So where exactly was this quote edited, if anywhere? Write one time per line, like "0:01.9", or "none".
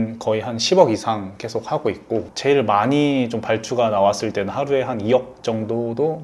0:02.3